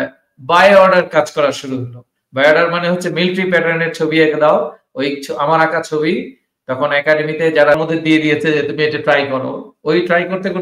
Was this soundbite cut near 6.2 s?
no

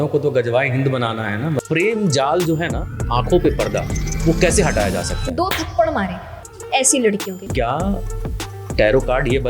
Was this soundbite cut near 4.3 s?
no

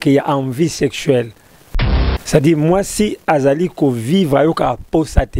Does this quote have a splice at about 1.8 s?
yes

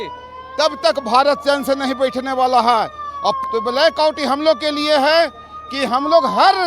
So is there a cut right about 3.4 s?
yes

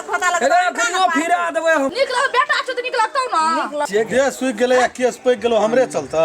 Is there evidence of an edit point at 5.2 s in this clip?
no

